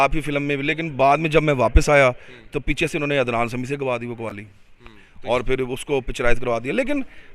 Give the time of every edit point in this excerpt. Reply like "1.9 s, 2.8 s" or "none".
none

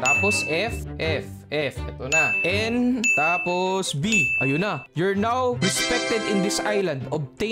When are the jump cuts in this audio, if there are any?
none

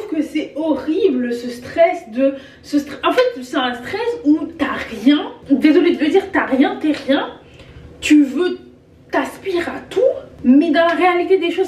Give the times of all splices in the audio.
5.3 s, 10.3 s

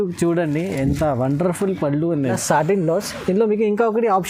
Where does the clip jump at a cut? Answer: 2.4 s

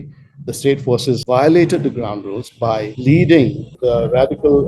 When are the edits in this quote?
1.2 s, 2.9 s, 3.8 s

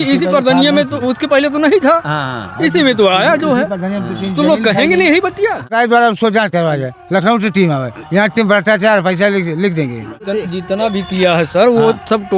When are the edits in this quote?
5.7 s, 10.2 s

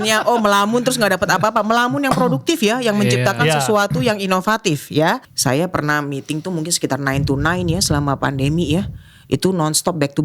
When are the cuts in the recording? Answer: 5.2 s

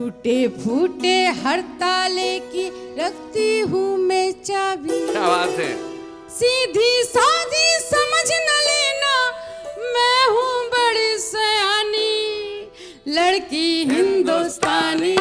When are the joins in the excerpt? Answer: none

